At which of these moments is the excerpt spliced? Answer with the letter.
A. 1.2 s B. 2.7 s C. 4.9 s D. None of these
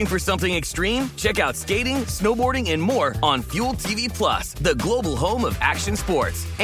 D